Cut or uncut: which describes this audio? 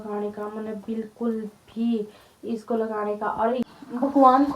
cut